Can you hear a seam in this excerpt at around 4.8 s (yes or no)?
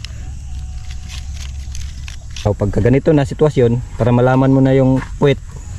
no